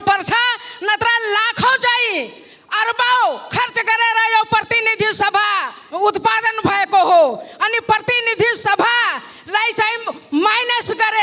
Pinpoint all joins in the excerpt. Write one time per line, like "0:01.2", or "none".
0:05.8